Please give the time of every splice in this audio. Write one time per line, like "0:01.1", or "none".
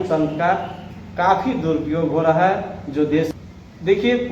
0:03.3